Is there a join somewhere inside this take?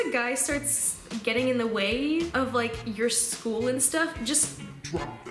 yes; 1 cut; at 1.1 s

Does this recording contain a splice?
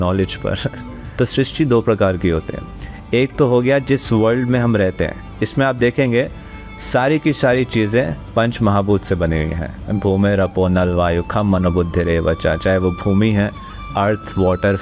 yes; 1 cut; at 1.1 s

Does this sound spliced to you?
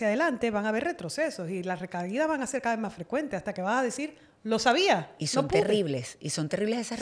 no; 0 cuts

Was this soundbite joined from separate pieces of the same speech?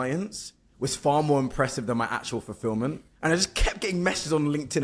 yes; 1 cut; at 3.1 s

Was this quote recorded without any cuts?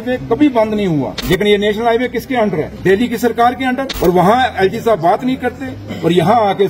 no; 3 cuts; at 1.1 s, 2.7 s, 3.9 s

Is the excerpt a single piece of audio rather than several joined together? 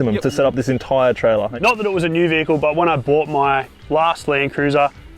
no; 2 cuts; at 1.5 s, 3.7 s

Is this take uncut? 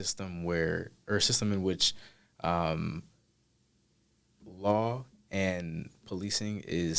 yes; 0 cuts

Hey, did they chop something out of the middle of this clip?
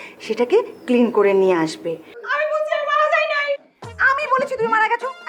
yes; 1 cut; at 2.2 s

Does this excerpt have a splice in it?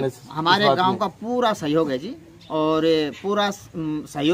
no; 0 cuts

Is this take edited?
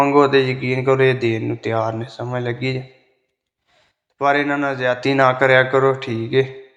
no; 0 cuts

